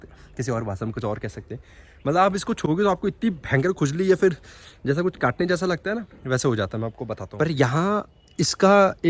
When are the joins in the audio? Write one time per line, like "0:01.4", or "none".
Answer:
none